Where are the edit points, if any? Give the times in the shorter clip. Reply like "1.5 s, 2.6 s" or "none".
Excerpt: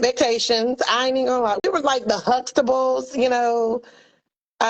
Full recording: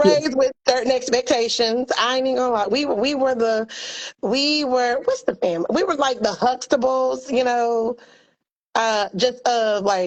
1.6 s